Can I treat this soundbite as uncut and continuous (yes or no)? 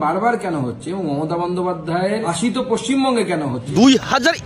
no